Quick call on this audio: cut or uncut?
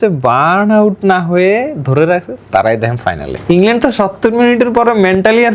cut